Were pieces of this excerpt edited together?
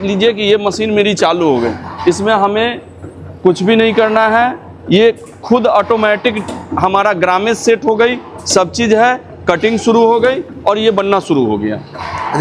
no; 0 cuts

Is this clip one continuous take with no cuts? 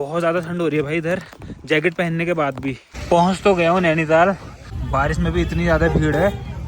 no; 2 cuts; at 2.9 s, 4.6 s

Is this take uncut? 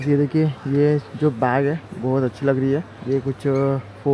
no; 1 cut; at 2.9 s

